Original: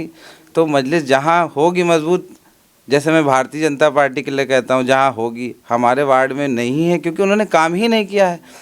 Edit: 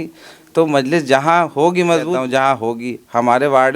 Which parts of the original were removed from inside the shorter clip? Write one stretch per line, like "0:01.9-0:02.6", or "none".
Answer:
0:02.2-0:04.7